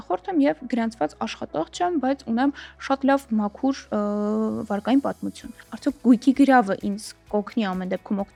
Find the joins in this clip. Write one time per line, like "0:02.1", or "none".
none